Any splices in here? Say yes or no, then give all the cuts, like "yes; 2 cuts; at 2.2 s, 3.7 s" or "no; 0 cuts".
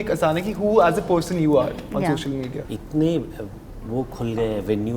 yes; 1 cut; at 2.6 s